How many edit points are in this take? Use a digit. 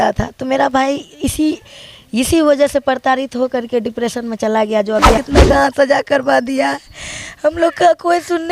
1